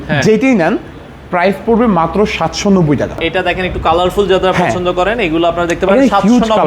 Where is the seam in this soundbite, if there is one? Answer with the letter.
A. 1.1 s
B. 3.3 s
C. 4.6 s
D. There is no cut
B